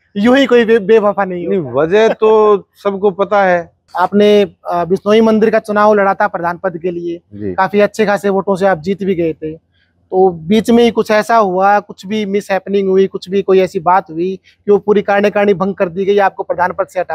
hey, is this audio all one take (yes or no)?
no